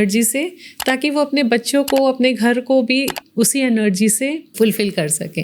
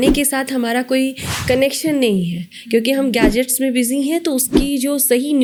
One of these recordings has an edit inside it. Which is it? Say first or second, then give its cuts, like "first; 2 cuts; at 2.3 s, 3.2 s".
first; 1 cut; at 4.5 s